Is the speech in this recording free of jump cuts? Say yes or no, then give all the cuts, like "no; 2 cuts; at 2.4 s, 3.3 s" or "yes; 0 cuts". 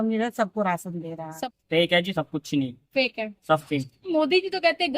no; 1 cut; at 1.3 s